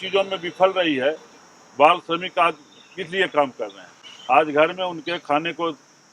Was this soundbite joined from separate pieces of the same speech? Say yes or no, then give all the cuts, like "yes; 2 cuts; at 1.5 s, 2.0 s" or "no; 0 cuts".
no; 0 cuts